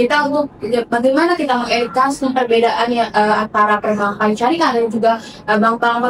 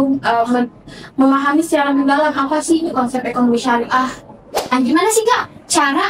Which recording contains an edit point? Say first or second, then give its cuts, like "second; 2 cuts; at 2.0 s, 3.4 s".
second; 1 cut; at 4.6 s